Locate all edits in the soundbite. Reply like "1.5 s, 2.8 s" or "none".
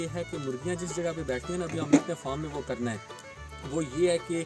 none